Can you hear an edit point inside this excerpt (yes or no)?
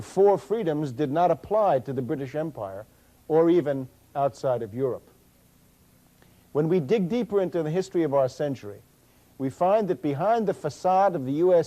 yes